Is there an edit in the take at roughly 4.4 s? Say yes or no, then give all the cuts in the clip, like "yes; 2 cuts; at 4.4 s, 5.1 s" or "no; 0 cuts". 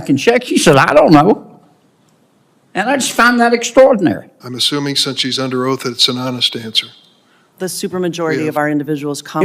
no; 1 cut; at 7.3 s